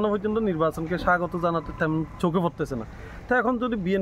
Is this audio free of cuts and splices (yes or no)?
yes